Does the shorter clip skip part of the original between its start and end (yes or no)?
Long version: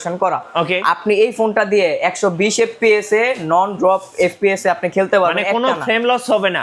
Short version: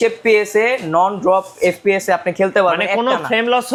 no